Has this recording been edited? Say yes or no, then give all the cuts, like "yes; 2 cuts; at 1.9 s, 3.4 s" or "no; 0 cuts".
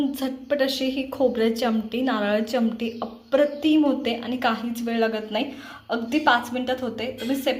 no; 0 cuts